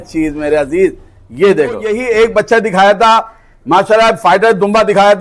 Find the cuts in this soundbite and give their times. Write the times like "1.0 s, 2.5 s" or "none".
1.9 s

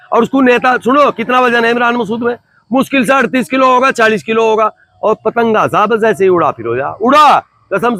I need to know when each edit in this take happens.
none

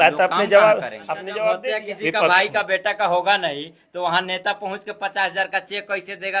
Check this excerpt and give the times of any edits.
1.6 s

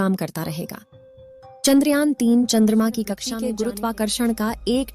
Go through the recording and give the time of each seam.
3.2 s

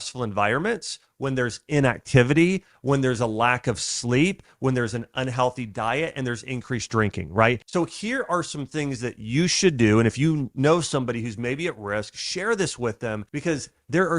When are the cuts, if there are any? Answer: 7.6 s, 13.3 s

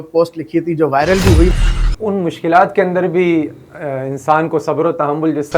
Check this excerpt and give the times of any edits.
1.6 s

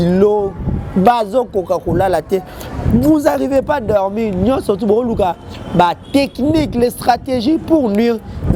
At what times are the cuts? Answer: none

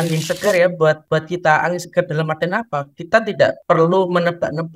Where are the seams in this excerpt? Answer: 1.0 s, 3.6 s

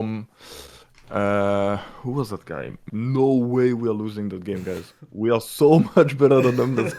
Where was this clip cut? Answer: 2.9 s

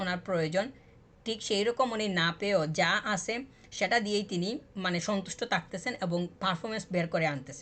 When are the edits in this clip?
none

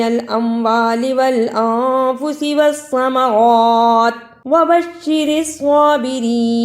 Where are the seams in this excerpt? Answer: 4.3 s

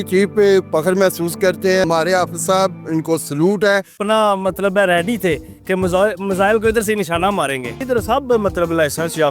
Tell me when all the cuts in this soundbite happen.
1.8 s, 4.0 s, 7.8 s

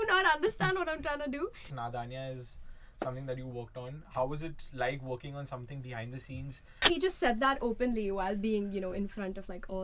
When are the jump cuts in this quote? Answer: 1.6 s, 6.9 s

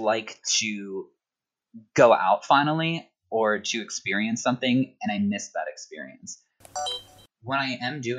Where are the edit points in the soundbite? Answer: 6.8 s

